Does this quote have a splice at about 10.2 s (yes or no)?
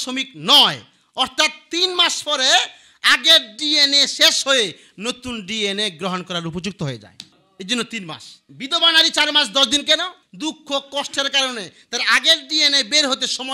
yes